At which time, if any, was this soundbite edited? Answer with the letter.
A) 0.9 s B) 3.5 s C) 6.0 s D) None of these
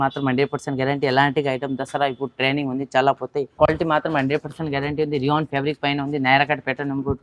B